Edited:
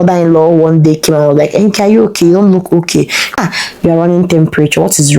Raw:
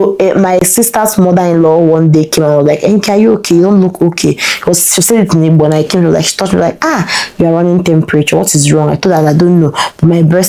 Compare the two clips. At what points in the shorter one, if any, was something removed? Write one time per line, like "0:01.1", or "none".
0:03.3